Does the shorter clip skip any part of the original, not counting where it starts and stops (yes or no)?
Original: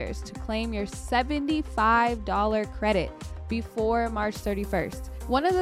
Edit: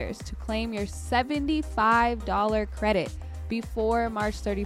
no